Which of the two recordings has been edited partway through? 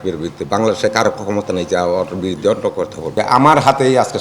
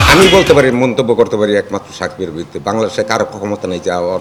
first; 1 cut; at 3.0 s

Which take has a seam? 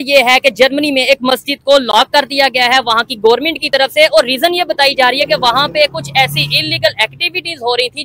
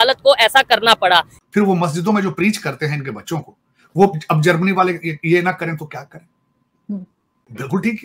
second; 1 cut; at 1.4 s

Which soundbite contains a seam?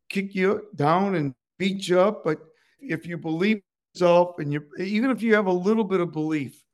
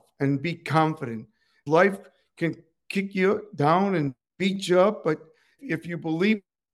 second; 1 cut; at 1.6 s

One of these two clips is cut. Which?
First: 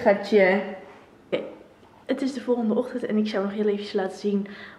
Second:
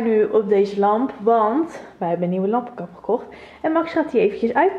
first; 1 cut; at 1.3 s

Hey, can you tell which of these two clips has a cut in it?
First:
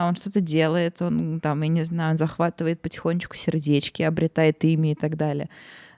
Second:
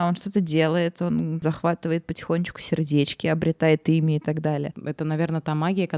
second; 2 cuts; at 1.4 s, 4.8 s

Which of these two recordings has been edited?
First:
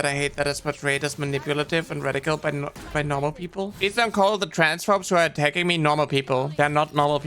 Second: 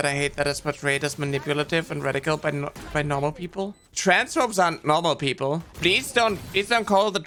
first; 2 cuts; at 3.7 s, 6.5 s

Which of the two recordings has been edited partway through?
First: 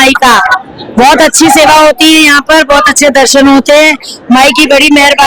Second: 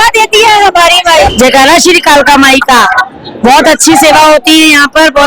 second; 1 cut; at 1.3 s

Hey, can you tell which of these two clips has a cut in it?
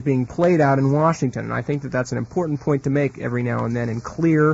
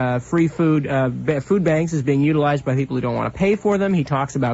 first; 1 cut; at 3.4 s

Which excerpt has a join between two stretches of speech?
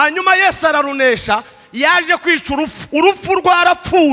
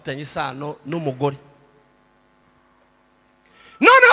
second; 1 cut; at 2.4 s

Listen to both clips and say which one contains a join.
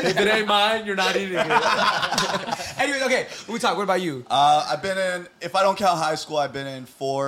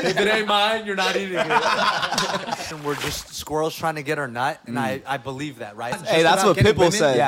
second; 2 cuts; at 2.7 s, 6.0 s

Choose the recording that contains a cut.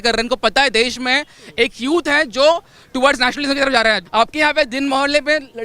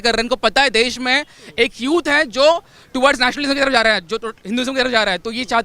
first; 1 cut; at 4.0 s

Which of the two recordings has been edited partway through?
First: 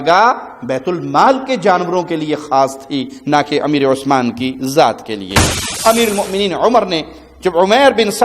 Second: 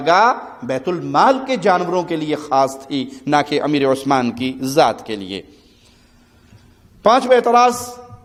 first; 1 cut; at 5.7 s

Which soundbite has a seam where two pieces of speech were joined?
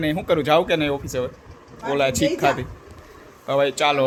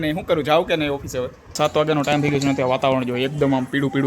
second; 1 cut; at 1.5 s

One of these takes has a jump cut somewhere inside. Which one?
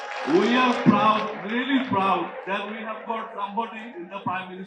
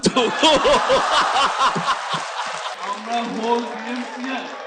second; 1 cut; at 2.7 s

